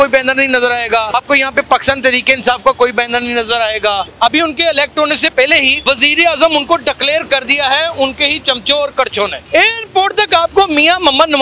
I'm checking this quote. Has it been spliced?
yes; 4 cuts; at 1.1 s, 4.1 s, 5.7 s, 9.4 s

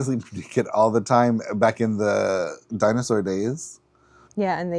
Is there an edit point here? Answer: yes; 1 cut; at 2.6 s

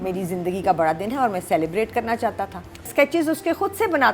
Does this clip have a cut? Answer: yes; 1 cut; at 2.9 s

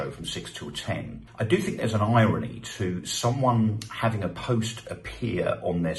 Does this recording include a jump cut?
yes; 1 cut; at 1.2 s

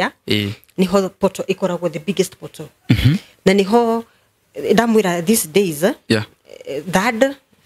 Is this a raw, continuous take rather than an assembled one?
yes; 0 cuts

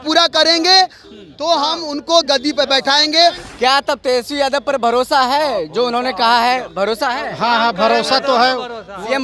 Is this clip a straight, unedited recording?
no; 1 cut; at 3.4 s

